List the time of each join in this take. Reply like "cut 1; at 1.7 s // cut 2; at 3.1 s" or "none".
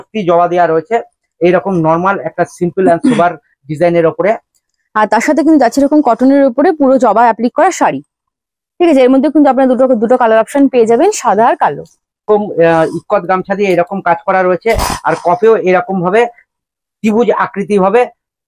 cut 1; at 12.3 s